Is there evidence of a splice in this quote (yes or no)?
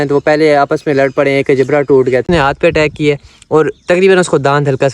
yes